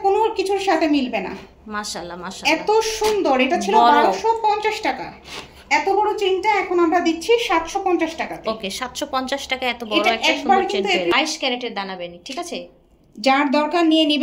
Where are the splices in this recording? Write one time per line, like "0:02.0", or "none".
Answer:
0:11.1